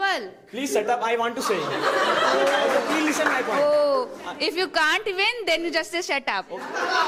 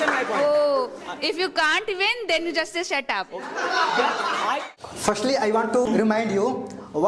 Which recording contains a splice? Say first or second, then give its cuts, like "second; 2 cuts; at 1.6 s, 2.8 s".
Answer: second; 2 cuts; at 4.8 s, 5.9 s